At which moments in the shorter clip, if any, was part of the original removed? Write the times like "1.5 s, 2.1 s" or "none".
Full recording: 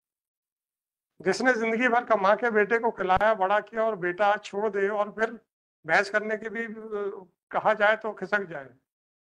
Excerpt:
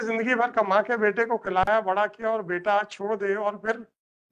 none